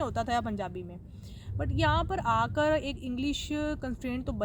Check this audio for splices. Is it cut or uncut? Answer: uncut